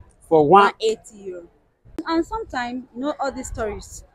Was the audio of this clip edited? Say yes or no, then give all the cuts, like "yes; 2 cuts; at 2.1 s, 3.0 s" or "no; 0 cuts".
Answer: yes; 1 cut; at 2.0 s